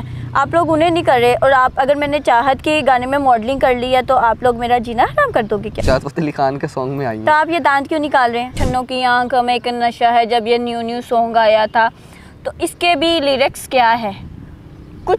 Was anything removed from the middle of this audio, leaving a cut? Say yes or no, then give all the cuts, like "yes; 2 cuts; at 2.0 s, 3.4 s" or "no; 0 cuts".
yes; 2 cuts; at 5.8 s, 8.6 s